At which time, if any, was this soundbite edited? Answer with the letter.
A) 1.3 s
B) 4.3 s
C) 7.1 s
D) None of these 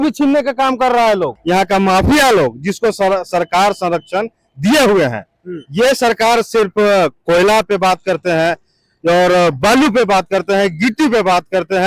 A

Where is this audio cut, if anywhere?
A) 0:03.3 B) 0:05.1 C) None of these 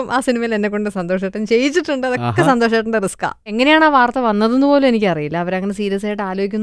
A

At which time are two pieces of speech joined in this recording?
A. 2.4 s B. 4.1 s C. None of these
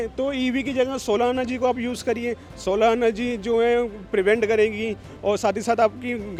C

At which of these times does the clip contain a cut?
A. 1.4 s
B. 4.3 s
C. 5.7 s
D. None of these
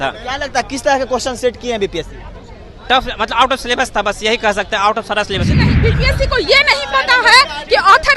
C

